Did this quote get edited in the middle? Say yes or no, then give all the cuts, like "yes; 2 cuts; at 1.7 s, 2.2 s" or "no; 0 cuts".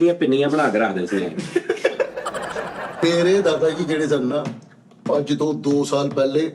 yes; 1 cut; at 3.0 s